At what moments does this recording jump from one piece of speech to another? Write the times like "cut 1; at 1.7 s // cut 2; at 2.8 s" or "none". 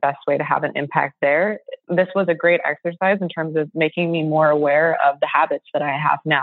none

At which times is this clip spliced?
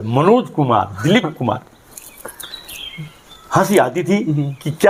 none

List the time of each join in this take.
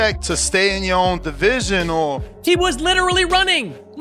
cut 1; at 2.3 s

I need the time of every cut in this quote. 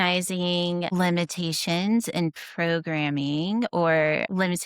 cut 1; at 0.9 s

